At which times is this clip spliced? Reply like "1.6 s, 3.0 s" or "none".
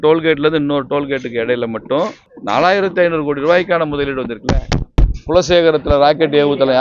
2.3 s, 4.9 s